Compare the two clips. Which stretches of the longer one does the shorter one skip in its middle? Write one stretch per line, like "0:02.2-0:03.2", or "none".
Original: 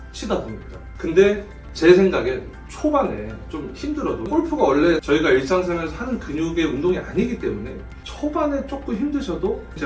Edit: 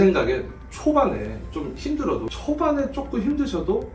0:04.2-0:08.0